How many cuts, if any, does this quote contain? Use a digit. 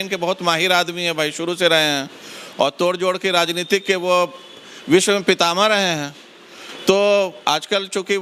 0